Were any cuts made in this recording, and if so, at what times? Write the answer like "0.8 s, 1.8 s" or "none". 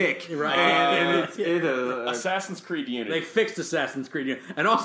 3.1 s